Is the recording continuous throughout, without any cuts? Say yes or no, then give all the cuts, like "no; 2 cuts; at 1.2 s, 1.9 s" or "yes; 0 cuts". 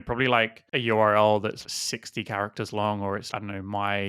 no; 2 cuts; at 1.6 s, 3.3 s